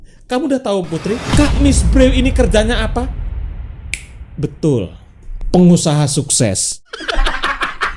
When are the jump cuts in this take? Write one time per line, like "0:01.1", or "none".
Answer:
0:06.8